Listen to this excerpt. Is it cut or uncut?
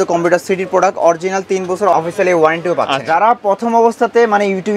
cut